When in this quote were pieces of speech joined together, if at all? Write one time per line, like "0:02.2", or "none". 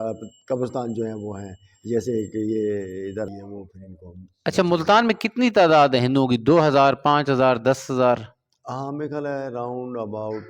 0:03.4